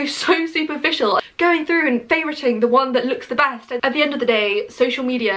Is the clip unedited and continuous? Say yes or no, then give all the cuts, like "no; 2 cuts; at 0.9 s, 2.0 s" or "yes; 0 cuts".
no; 2 cuts; at 1.2 s, 3.7 s